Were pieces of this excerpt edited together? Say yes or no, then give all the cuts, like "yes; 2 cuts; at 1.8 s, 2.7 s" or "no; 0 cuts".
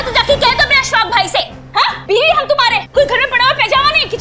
yes; 1 cut; at 2.8 s